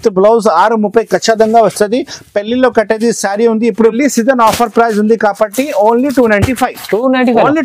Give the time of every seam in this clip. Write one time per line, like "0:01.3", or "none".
0:03.9